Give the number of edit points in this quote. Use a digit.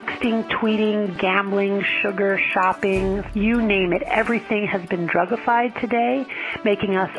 2